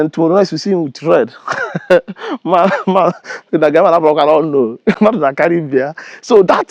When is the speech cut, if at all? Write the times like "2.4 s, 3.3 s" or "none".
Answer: none